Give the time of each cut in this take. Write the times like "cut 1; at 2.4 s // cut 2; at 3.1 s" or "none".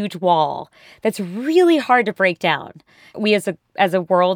cut 1; at 3.0 s